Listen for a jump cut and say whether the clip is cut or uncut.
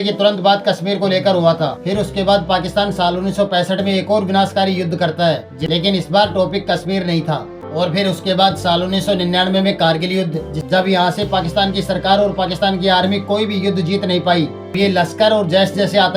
cut